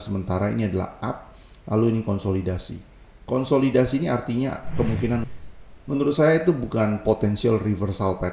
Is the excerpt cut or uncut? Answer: cut